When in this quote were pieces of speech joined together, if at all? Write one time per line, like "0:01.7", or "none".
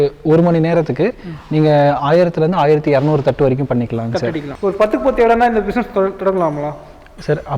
0:04.4